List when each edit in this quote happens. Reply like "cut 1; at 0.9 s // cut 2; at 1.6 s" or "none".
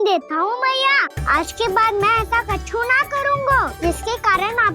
cut 1; at 1.1 s // cut 2; at 3.7 s